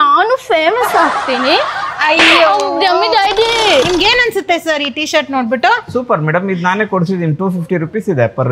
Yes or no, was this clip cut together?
yes